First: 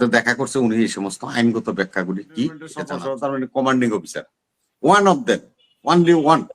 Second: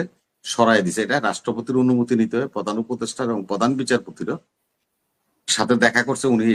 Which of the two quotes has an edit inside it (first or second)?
first